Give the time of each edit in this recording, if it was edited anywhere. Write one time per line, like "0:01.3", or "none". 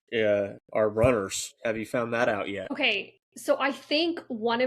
0:02.7